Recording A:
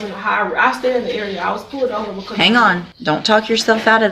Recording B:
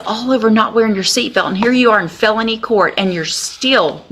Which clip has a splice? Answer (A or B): A